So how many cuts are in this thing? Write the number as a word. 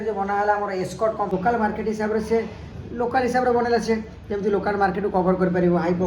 one